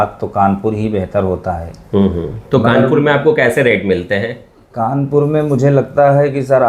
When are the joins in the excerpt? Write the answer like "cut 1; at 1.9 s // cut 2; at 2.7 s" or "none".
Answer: none

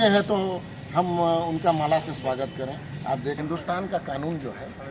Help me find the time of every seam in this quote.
cut 1; at 3.4 s

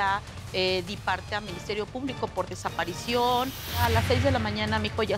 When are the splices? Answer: cut 1; at 3.8 s

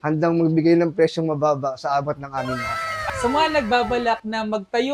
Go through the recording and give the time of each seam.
cut 1; at 3.0 s

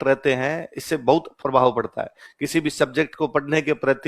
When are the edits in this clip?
cut 1; at 1.3 s

